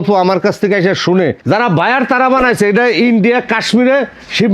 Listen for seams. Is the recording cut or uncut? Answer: cut